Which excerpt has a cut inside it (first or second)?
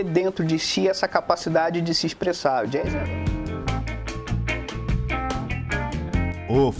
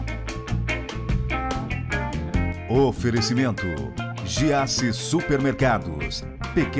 first